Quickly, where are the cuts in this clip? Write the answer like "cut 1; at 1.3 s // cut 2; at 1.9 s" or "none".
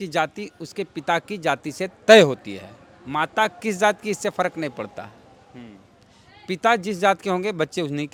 none